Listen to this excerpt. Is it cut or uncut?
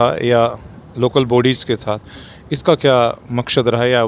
uncut